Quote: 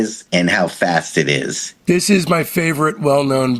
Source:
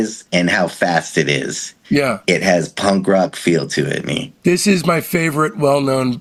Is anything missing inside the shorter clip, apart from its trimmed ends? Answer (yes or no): yes